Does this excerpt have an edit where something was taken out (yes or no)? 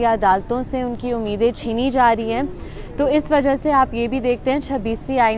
no